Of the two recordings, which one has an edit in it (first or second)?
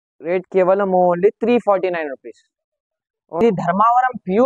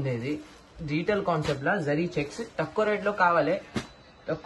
first